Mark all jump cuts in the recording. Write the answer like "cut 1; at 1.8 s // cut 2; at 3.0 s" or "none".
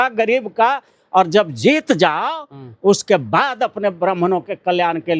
none

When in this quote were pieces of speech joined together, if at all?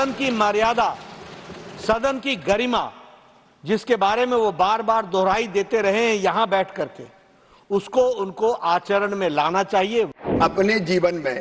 cut 1; at 10.2 s

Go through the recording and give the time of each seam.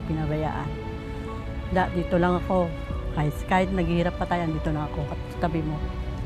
none

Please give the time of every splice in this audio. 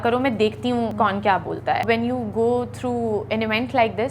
cut 1; at 0.9 s // cut 2; at 1.8 s

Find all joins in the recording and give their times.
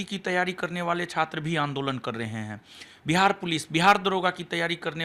none

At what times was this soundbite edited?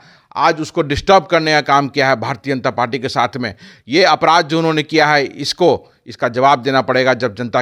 none

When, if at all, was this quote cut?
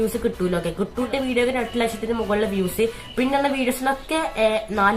cut 1; at 1.1 s

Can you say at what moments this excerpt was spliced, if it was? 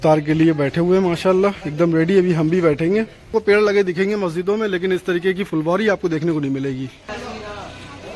cut 1; at 3.3 s // cut 2; at 7.1 s

